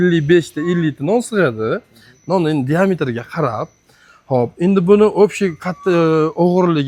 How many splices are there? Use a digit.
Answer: 0